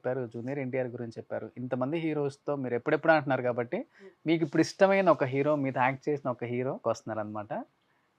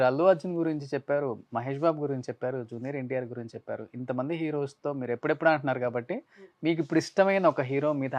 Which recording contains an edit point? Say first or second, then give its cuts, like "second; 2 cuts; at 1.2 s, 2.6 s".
first; 1 cut; at 6.8 s